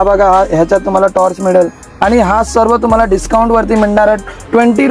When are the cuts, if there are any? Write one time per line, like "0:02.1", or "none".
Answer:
0:01.8